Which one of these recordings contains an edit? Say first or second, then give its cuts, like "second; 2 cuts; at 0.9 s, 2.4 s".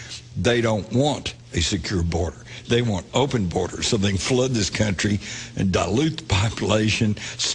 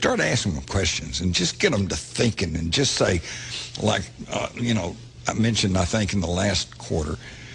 first; 1 cut; at 5.8 s